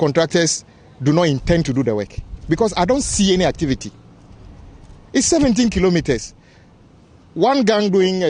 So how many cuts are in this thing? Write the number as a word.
zero